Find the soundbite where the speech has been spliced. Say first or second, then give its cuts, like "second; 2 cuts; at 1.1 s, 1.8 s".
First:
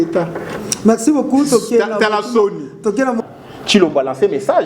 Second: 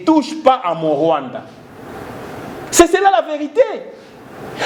first; 1 cut; at 3.2 s